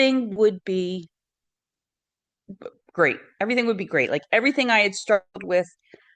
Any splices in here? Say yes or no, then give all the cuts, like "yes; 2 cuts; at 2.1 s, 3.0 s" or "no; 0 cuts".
no; 0 cuts